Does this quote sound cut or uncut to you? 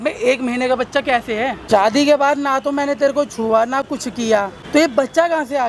cut